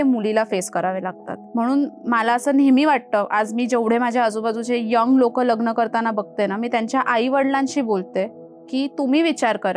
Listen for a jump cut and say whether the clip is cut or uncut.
uncut